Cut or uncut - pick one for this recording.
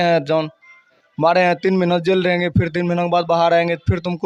uncut